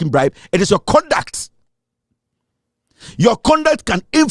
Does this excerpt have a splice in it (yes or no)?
no